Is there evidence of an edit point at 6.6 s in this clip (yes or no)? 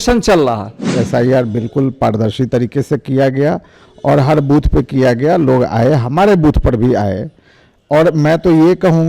no